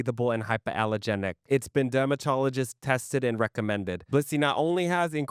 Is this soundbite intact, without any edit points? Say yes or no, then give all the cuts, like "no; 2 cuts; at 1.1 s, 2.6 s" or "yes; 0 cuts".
no; 1 cut; at 4.0 s